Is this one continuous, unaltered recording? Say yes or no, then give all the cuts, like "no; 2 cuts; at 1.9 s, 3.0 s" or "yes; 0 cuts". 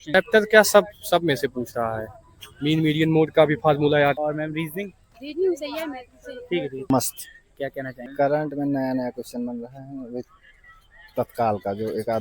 no; 2 cuts; at 4.2 s, 8.0 s